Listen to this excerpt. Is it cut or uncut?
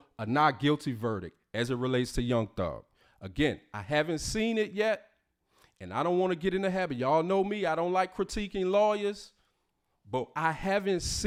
uncut